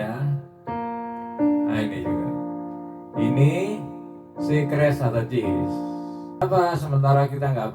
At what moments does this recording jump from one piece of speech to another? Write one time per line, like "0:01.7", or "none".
0:06.4

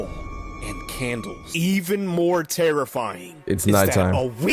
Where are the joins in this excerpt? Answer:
0:01.4

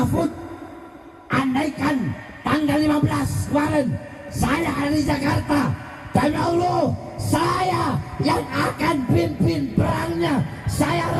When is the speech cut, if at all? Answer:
none

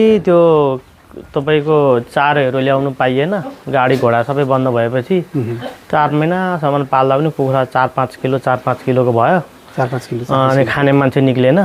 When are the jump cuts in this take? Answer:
none

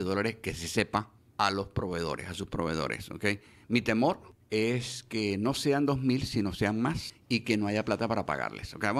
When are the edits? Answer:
0:01.2
0:04.3
0:07.1

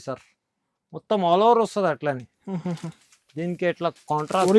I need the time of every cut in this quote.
none

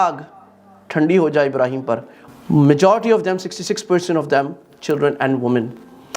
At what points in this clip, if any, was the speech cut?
0:02.1

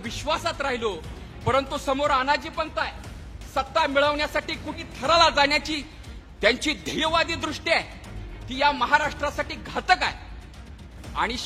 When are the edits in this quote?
0:04.9

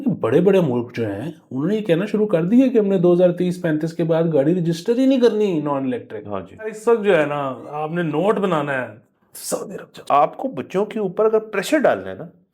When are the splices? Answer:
0:06.8
0:10.0

